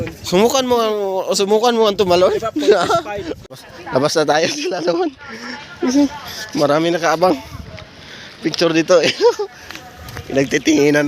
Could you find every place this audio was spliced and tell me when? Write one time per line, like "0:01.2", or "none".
0:03.3